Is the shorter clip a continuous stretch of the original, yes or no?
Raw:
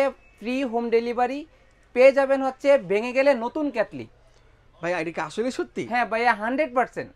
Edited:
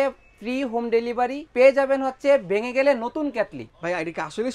no